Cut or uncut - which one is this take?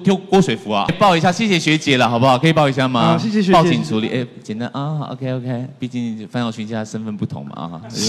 cut